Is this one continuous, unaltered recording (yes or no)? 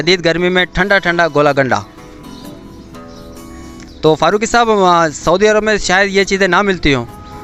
yes